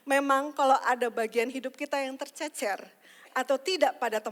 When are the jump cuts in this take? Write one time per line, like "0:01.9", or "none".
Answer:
none